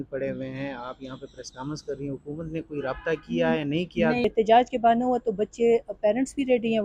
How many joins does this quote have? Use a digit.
1